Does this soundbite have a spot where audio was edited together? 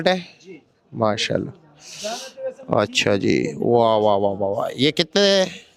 no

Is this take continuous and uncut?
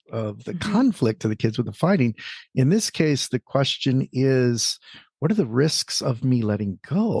yes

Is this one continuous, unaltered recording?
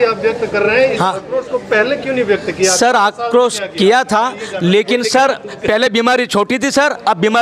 yes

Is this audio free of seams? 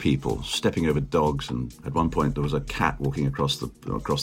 no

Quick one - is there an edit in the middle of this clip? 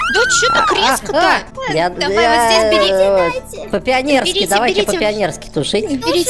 yes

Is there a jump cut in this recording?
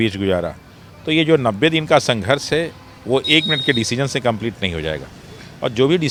no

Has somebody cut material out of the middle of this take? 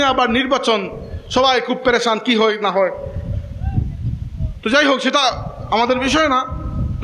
no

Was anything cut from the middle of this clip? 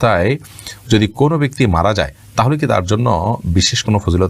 no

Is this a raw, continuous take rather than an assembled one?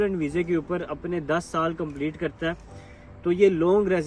yes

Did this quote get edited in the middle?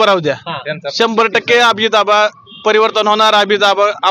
no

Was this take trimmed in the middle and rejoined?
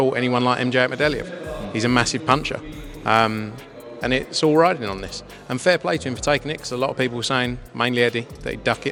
no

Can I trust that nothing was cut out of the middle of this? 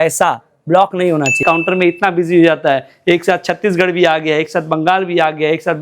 no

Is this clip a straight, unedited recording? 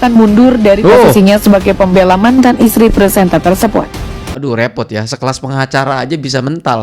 no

